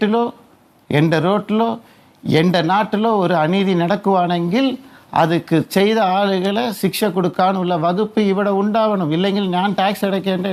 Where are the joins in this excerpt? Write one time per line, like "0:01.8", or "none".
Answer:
none